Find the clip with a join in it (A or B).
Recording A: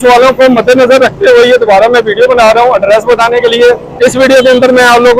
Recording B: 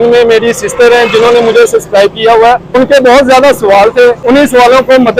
B